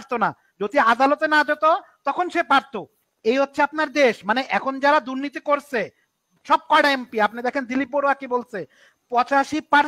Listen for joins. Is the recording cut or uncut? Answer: uncut